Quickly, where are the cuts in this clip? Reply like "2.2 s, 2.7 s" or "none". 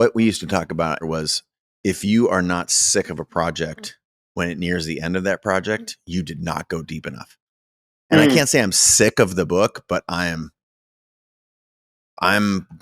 1.0 s